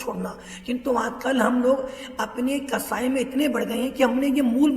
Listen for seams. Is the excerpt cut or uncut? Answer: uncut